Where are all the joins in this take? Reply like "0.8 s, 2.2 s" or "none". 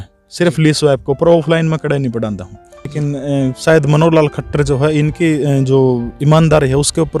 3.0 s